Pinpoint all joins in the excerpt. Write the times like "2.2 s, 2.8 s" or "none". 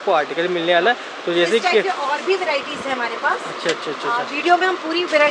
none